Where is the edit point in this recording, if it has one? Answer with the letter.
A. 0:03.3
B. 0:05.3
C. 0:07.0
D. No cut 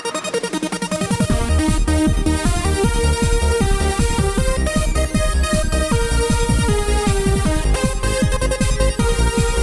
C